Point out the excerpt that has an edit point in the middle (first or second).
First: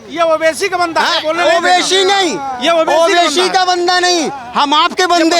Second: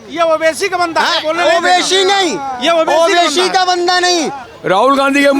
second